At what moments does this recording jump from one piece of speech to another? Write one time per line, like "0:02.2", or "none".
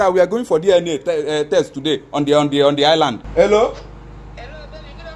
0:03.2

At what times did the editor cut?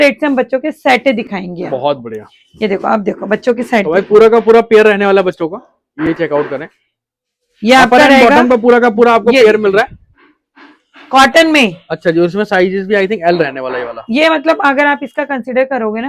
none

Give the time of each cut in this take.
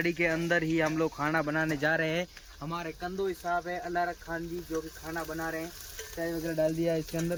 none

